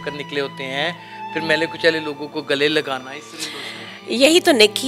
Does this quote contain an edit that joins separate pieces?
no; 0 cuts

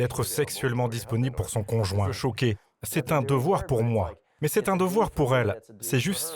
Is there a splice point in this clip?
yes; 1 cut; at 2.2 s

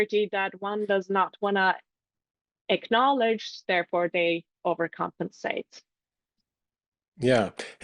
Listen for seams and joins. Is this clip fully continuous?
yes; 0 cuts

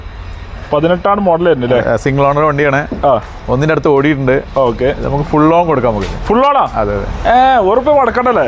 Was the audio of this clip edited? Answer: no; 0 cuts

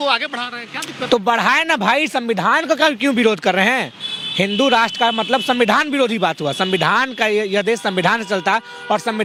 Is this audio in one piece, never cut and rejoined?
yes; 0 cuts

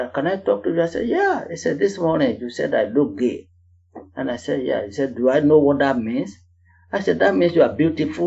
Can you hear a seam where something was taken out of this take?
no; 0 cuts

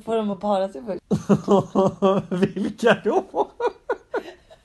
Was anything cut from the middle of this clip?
yes; 1 cut; at 0.9 s

